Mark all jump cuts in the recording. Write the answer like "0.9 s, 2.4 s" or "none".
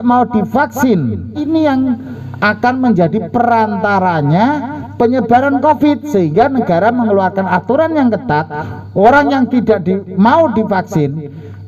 1.4 s